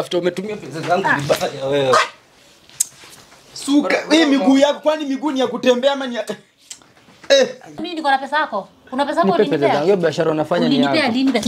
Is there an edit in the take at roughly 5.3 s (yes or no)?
no